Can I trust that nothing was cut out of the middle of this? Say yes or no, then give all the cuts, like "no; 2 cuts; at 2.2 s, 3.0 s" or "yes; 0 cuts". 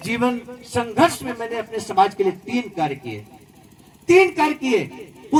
yes; 0 cuts